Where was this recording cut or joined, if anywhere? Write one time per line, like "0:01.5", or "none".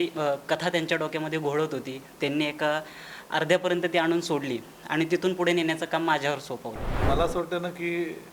0:07.0

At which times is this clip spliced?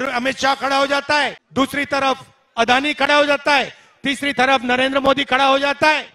0:01.4

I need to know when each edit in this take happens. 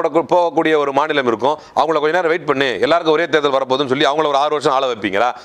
none

